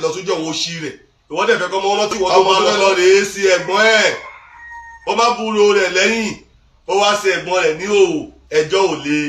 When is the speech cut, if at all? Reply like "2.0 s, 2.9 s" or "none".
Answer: 2.5 s

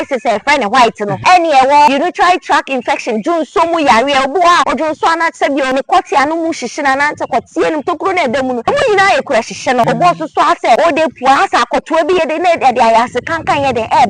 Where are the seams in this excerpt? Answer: 1.1 s, 1.9 s, 4.7 s, 5.7 s, 8.6 s, 9.9 s, 11.0 s

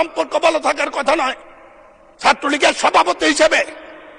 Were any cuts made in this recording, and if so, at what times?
none

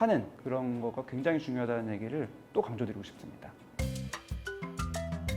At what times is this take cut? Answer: 3.6 s

